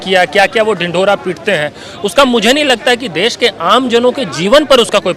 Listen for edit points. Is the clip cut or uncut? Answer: uncut